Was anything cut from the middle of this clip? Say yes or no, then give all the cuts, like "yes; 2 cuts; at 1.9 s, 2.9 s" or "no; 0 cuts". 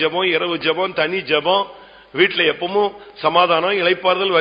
no; 0 cuts